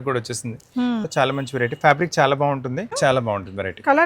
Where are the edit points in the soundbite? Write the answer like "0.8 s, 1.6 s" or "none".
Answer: 1.1 s, 2.9 s